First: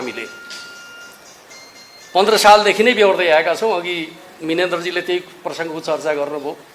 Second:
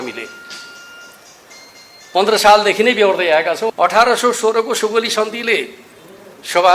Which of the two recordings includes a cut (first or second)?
second